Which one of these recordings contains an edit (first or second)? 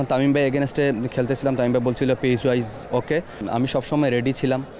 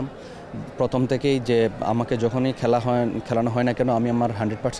first